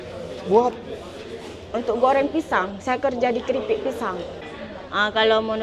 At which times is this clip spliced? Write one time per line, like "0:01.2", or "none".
0:04.4